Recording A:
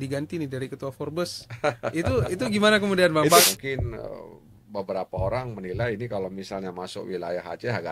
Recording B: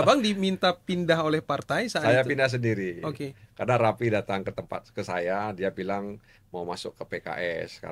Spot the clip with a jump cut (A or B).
A